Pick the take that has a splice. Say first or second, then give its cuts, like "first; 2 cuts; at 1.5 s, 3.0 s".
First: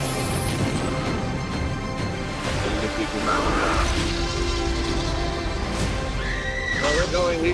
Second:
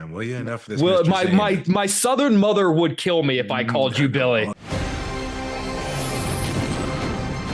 second; 1 cut; at 4.6 s